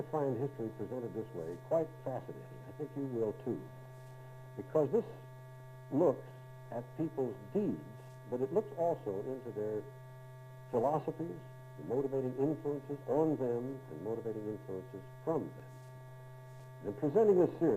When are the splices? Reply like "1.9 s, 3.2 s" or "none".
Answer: 16.6 s